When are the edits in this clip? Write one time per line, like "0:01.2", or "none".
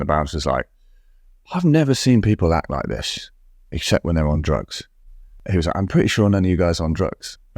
0:05.4